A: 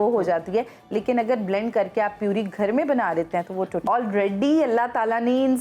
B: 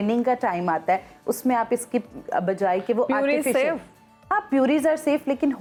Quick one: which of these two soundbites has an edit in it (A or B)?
A